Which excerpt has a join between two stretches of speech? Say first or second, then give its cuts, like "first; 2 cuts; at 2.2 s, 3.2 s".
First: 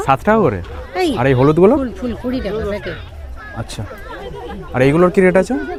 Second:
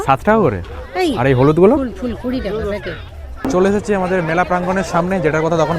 second; 1 cut; at 3.5 s